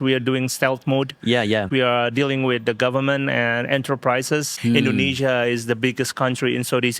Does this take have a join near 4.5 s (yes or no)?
yes